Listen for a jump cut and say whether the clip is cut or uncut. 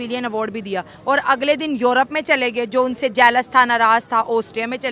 uncut